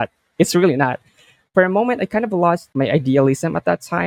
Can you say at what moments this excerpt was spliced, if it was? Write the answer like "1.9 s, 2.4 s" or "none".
2.7 s